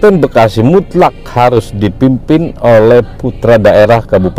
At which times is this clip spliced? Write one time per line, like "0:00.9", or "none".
none